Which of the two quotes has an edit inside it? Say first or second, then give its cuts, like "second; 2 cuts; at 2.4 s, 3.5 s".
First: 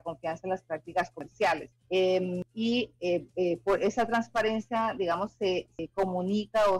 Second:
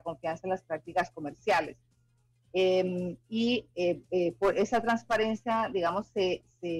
first; 3 cuts; at 1.2 s, 2.4 s, 5.8 s